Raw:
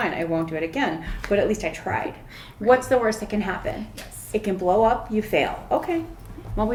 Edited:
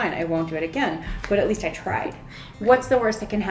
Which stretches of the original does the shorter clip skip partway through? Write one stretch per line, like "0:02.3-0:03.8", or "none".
none

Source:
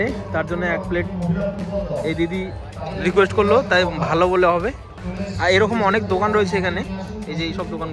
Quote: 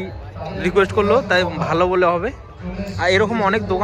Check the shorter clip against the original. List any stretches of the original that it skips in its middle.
none

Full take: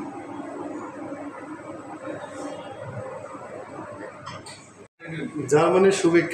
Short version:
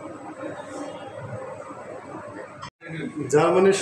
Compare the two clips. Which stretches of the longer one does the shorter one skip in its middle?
0:04.4-0:04.9

